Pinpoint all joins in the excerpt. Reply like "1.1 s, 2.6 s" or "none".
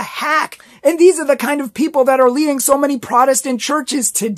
none

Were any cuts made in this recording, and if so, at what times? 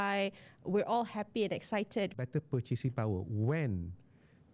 2.2 s

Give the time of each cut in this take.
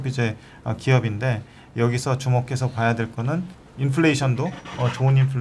3.6 s

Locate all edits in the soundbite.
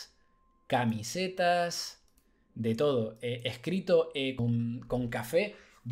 4.4 s

